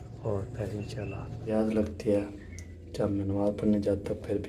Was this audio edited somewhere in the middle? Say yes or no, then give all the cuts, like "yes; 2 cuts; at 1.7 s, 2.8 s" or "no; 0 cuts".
yes; 1 cut; at 1.5 s